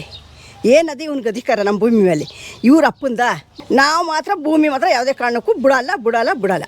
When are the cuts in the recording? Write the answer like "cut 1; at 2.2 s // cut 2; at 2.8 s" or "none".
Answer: cut 1; at 3.5 s